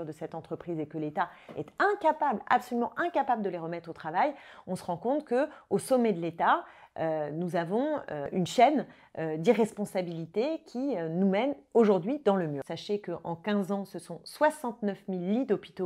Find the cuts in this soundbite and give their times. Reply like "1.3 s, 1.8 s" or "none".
8.3 s, 12.6 s